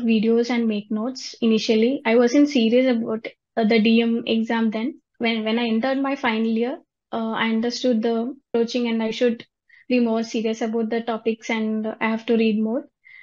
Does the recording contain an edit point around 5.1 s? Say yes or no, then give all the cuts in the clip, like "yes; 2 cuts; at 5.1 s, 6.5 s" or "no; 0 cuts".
yes; 2 cuts; at 5.1 s, 8.5 s